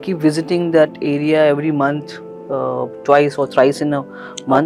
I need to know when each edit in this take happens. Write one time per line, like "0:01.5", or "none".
none